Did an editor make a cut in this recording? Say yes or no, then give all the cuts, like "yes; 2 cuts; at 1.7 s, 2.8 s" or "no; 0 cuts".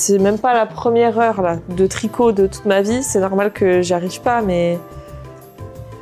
no; 0 cuts